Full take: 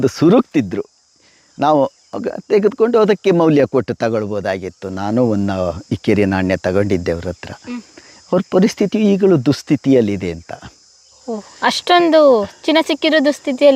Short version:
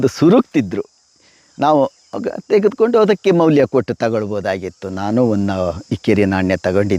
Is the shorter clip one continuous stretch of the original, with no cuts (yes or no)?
yes